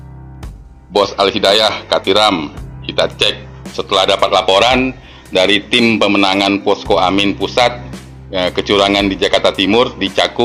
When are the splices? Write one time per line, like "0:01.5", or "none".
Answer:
none